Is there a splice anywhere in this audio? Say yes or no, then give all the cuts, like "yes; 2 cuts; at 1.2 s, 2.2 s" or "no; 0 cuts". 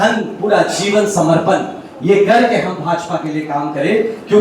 no; 0 cuts